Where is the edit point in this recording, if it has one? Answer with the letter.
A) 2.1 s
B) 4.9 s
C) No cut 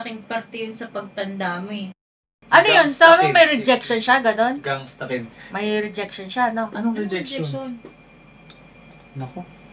A